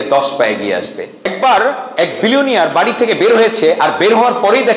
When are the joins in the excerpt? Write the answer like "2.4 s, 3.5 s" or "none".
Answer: 1.3 s